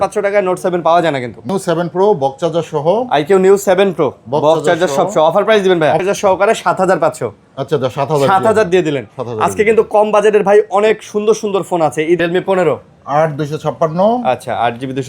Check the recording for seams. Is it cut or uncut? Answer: cut